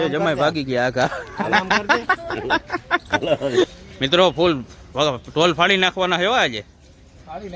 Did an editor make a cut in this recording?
yes; 1 cut; at 3.6 s

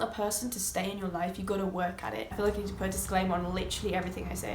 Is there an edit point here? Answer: yes; 1 cut; at 2.4 s

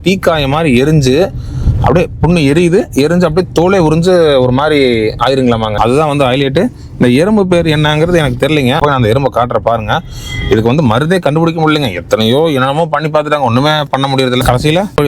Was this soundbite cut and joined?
no; 0 cuts

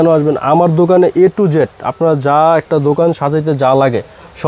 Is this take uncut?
yes; 0 cuts

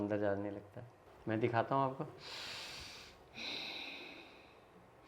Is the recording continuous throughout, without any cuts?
no; 1 cut; at 1.1 s

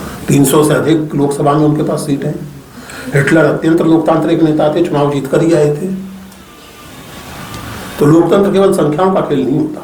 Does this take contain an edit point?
no; 0 cuts

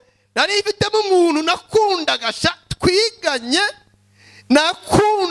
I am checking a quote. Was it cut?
no; 0 cuts

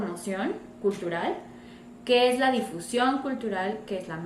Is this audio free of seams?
yes; 0 cuts

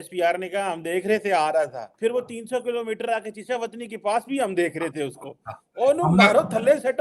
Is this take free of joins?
no; 1 cut; at 1.8 s

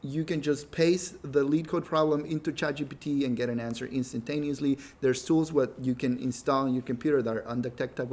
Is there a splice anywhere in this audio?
no; 0 cuts

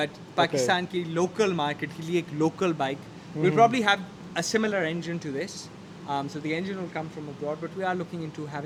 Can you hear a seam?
no; 0 cuts

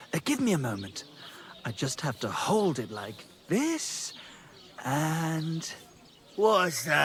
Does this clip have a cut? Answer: no; 0 cuts

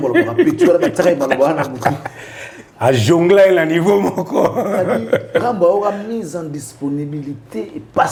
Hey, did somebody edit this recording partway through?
no; 0 cuts

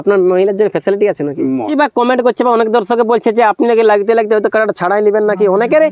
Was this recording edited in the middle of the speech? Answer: yes; 1 cut; at 1.7 s

